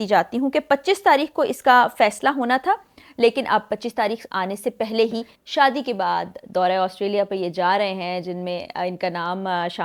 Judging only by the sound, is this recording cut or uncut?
cut